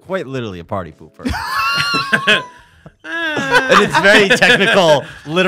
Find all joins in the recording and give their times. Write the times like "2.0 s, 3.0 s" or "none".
none